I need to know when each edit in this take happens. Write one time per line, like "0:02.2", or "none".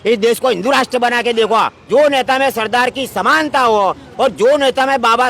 0:01.8